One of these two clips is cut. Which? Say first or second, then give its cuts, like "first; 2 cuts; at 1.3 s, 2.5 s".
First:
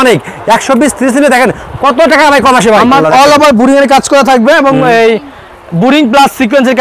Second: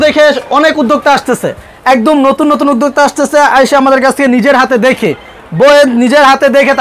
first; 1 cut; at 3.0 s